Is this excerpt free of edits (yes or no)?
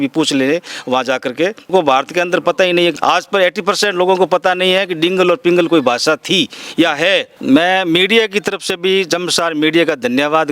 no